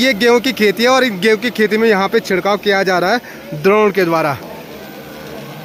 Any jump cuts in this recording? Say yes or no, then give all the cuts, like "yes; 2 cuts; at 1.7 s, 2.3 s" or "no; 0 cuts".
no; 0 cuts